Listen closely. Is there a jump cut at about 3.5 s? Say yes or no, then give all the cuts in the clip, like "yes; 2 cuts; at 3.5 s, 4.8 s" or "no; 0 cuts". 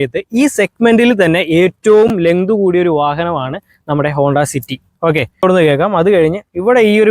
no; 1 cut; at 5.4 s